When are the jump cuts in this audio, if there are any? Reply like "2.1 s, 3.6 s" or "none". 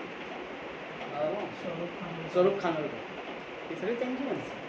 1.3 s